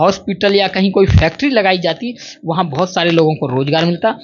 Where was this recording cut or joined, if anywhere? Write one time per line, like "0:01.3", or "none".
none